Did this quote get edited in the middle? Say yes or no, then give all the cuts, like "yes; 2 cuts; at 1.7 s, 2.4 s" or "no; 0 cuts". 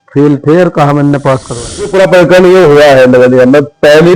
yes; 1 cut; at 1.9 s